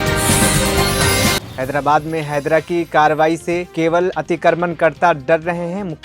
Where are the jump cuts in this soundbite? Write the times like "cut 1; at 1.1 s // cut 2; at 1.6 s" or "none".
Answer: cut 1; at 1.4 s